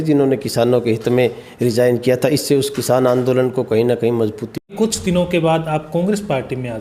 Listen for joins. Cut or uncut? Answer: cut